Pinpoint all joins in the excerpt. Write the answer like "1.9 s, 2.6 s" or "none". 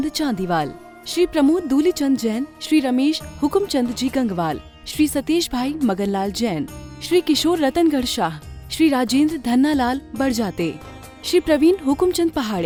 none